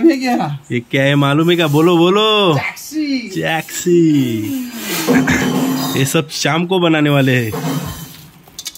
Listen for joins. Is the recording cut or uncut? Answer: uncut